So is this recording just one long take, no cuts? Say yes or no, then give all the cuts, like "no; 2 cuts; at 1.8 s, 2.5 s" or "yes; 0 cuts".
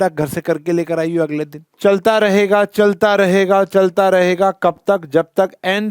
no; 1 cut; at 1.6 s